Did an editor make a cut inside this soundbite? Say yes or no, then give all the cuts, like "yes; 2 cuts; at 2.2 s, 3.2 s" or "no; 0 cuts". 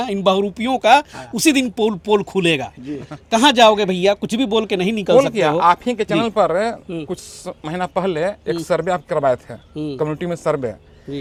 no; 0 cuts